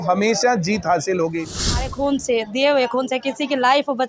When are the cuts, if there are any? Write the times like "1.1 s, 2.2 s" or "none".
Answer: 1.8 s